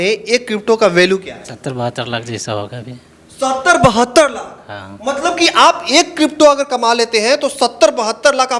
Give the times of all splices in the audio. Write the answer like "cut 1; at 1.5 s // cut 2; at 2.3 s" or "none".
cut 1; at 1.6 s